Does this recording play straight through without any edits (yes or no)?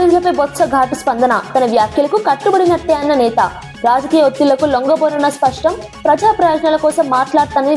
yes